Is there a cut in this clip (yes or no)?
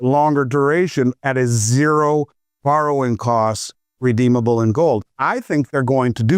no